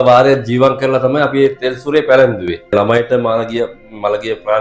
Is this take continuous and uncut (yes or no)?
no